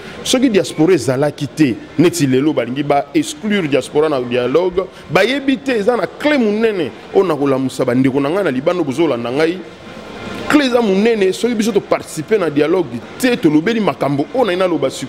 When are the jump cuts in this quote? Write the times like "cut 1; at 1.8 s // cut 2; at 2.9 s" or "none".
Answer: none